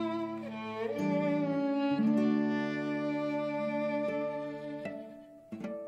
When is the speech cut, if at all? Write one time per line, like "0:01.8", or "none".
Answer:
none